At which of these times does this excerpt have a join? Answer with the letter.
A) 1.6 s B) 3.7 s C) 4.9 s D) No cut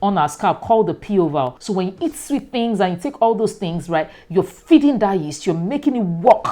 A